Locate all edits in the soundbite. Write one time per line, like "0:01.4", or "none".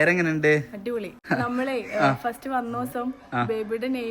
0:01.2